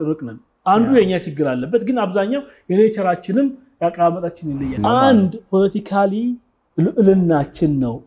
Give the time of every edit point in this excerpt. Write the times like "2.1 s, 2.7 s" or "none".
4.8 s